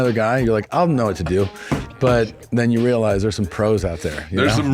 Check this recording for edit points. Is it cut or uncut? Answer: uncut